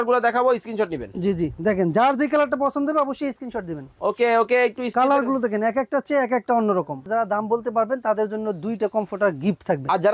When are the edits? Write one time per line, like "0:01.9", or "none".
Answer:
0:07.0